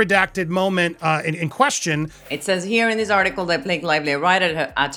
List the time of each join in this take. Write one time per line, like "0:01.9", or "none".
none